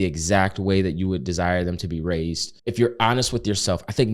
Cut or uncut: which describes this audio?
cut